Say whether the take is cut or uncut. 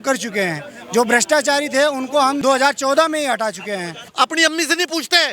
cut